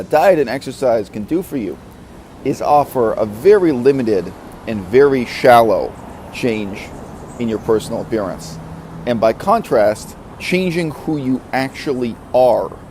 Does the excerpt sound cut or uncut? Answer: cut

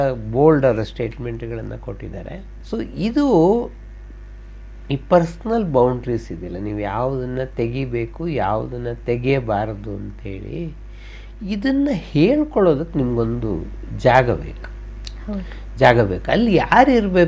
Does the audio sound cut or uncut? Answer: uncut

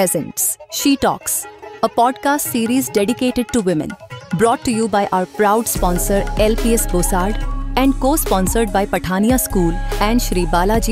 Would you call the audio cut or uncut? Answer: uncut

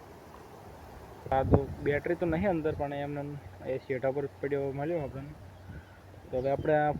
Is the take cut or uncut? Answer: cut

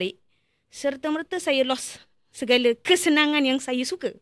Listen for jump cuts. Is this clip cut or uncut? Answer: uncut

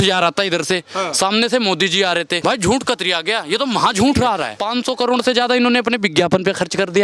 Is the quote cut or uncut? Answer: cut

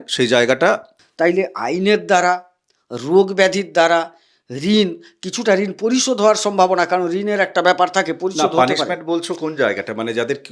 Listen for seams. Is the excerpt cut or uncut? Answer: cut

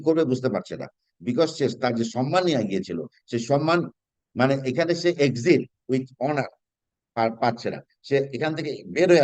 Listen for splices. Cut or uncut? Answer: uncut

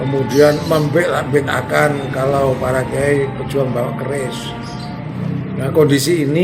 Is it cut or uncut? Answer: cut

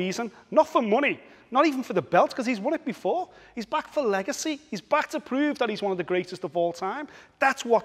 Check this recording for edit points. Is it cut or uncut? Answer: uncut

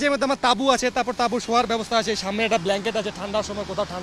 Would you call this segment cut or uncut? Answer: uncut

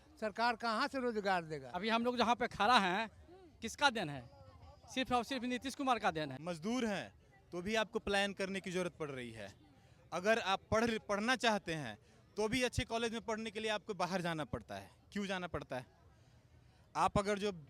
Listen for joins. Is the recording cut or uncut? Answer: cut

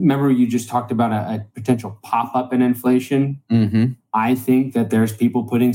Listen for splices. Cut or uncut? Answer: cut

